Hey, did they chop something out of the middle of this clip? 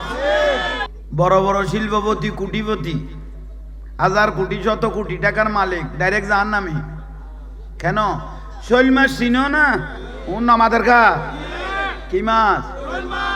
yes; 1 cut; at 1.0 s

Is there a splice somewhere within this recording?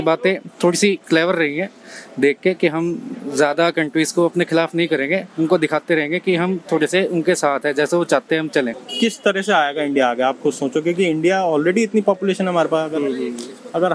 yes; 1 cut; at 8.8 s

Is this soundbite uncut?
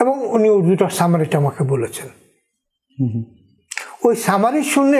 yes; 0 cuts

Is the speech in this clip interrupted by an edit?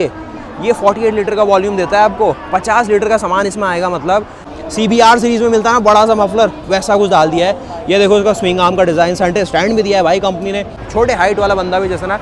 yes; 2 cuts; at 4.6 s, 10.8 s

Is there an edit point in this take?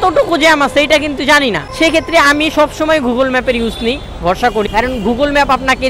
yes; 2 cuts; at 1.7 s, 4.6 s

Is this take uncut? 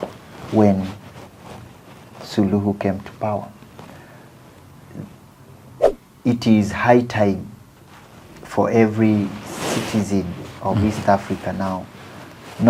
no; 1 cut; at 5.8 s

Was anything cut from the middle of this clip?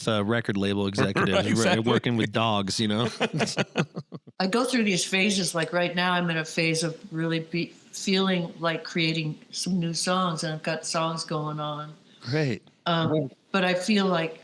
yes; 1 cut; at 4.0 s

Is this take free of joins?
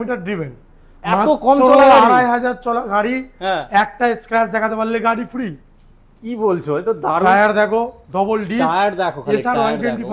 yes; 0 cuts

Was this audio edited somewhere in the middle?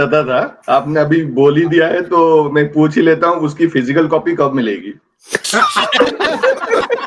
no; 0 cuts

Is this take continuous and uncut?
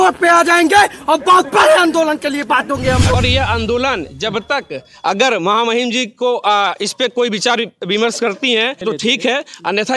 no; 2 cuts; at 3.1 s, 8.8 s

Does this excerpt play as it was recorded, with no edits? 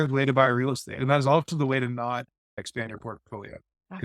no; 1 cut; at 2.6 s

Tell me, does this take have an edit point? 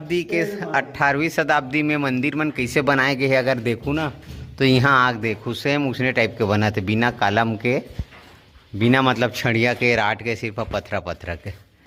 no; 0 cuts

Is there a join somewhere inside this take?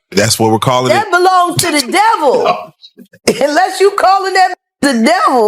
no; 0 cuts

